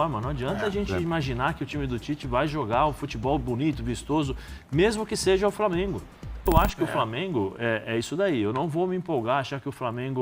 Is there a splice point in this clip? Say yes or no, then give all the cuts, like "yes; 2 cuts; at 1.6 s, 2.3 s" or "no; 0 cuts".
yes; 1 cut; at 6.5 s